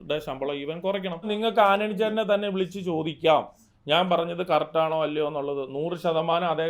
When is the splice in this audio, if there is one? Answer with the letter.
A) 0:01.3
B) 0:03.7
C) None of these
A